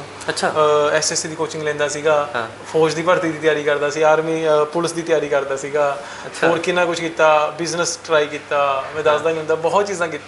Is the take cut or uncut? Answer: uncut